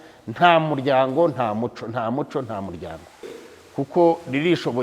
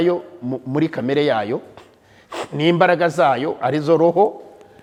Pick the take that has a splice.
first; 1 cut; at 3.4 s

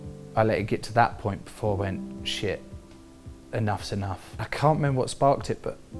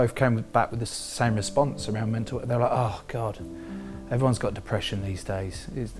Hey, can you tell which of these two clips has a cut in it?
first; 1 cut; at 4.4 s

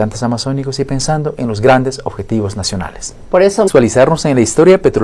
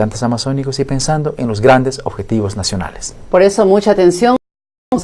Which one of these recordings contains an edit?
second; 1 cut; at 3.7 s

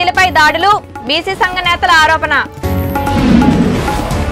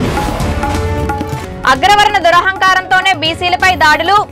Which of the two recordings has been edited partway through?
second; 1 cut; at 1.3 s

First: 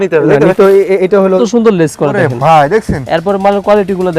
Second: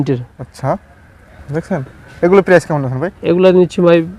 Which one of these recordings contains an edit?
first; 1 cut; at 1.4 s

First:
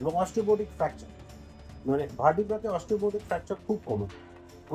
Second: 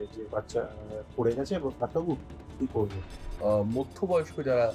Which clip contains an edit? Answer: second; 1 cut; at 3.3 s

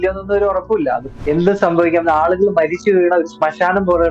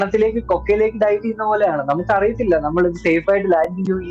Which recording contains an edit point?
first; 1 cut; at 1.1 s

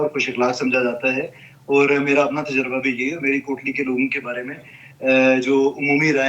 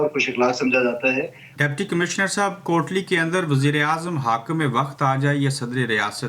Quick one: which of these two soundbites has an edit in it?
second; 1 cut; at 1.4 s

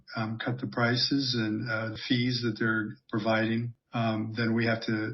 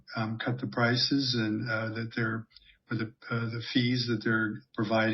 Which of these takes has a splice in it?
first; 2 cuts; at 2.0 s, 3.8 s

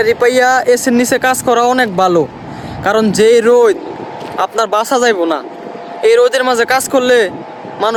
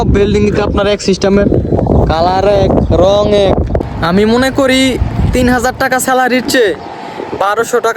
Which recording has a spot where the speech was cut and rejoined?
second; 1 cut; at 3.8 s

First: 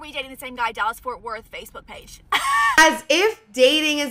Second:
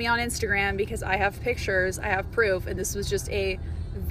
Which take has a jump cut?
first; 1 cut; at 2.8 s

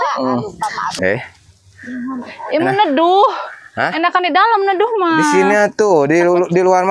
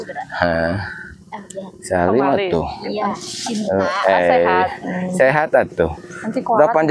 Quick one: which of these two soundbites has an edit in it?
first; 1 cut; at 0.9 s

